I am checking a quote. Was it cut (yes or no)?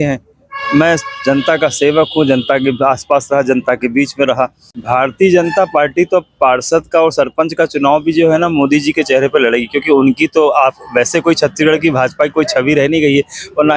yes